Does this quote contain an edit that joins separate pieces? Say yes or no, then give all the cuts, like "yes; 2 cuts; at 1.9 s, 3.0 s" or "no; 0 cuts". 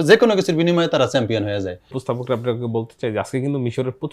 yes; 1 cut; at 2.0 s